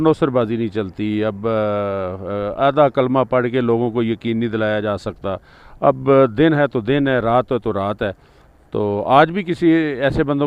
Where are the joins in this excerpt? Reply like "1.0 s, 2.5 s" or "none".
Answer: none